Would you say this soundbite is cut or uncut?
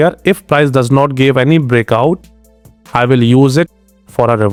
uncut